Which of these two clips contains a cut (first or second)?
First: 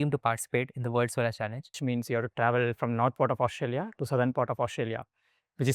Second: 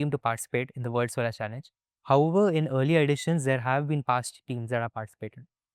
first